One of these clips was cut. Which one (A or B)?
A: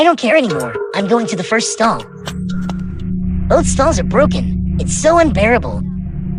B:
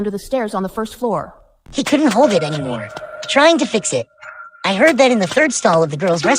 B